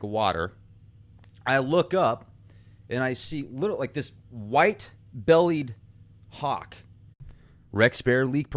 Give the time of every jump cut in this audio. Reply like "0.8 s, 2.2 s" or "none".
none